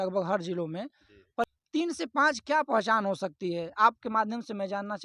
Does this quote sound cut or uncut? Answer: cut